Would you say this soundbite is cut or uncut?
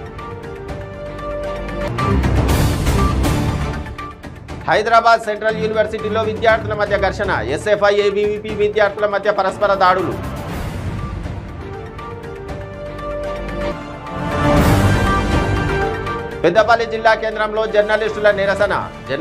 cut